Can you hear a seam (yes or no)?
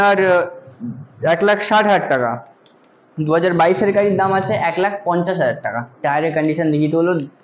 no